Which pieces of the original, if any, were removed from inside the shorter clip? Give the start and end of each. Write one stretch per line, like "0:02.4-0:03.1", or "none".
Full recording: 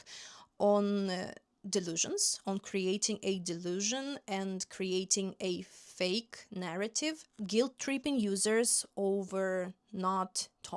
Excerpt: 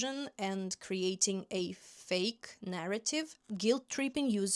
none